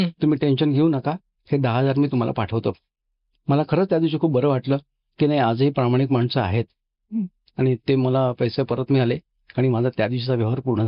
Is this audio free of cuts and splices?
yes; 0 cuts

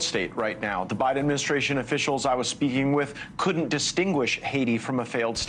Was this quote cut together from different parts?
no; 0 cuts

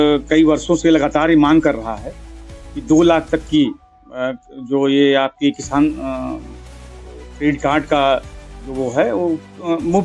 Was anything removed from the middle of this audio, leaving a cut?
no; 0 cuts

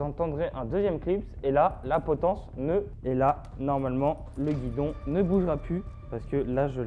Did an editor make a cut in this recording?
yes; 1 cut; at 2.9 s

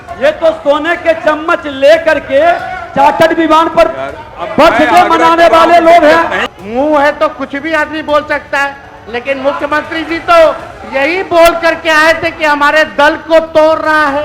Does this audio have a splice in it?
yes; 1 cut; at 6.5 s

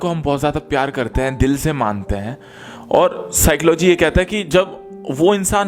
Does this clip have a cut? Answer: no; 0 cuts

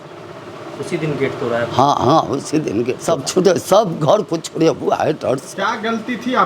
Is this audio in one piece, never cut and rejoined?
no; 1 cut; at 3.0 s

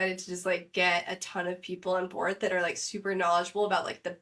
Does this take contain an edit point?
no; 0 cuts

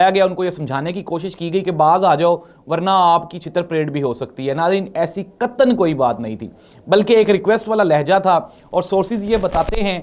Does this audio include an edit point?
no; 0 cuts

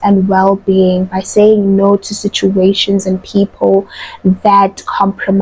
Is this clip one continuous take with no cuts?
yes; 0 cuts

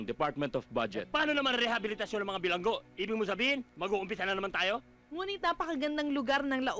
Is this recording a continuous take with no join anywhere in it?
no; 1 cut; at 1.0 s

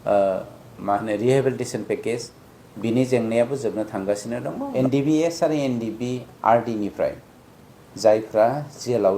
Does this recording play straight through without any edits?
no; 1 cut; at 4.7 s

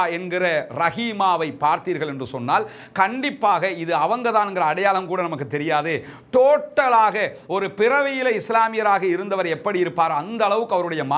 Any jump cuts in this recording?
no; 0 cuts

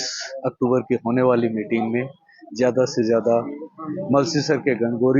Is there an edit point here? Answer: no; 0 cuts

